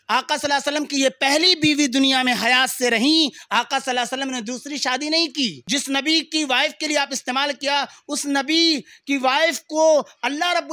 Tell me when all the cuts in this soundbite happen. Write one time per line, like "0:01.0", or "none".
0:05.6